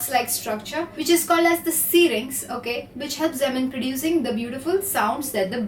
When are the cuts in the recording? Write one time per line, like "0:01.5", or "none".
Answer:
0:02.9

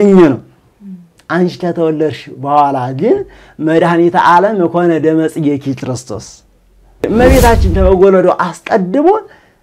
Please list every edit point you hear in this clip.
0:07.1

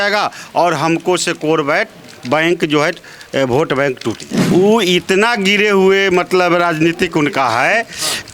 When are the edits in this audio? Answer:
0:04.3

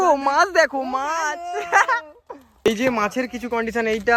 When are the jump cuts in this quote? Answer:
none

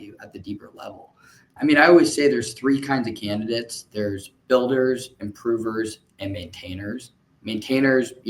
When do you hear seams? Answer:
0:01.5

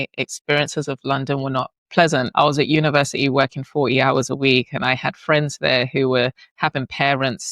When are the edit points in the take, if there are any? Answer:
0:02.3

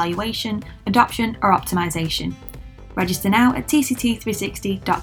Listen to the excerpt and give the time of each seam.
none

